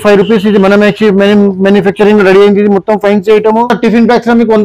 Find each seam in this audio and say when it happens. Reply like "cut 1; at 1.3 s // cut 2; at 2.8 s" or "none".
cut 1; at 3.7 s